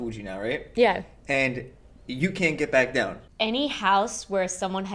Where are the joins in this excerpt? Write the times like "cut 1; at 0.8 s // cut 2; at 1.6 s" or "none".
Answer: cut 1; at 3.2 s